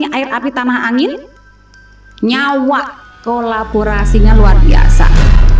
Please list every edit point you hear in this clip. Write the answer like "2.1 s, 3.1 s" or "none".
3.2 s